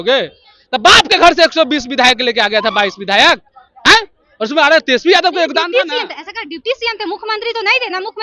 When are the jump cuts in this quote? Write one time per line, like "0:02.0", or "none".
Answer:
none